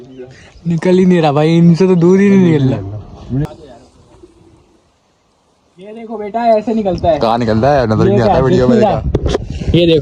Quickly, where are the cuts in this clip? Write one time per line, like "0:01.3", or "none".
0:03.5